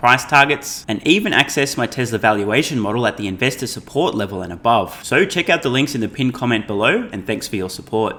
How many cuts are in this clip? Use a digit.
0